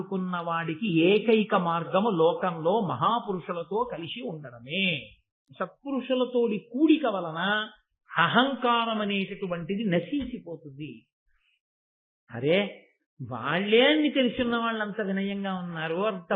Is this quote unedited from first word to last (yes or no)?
no